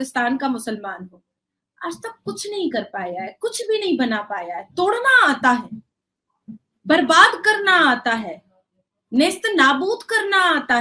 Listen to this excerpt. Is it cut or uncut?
uncut